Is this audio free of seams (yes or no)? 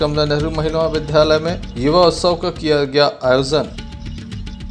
no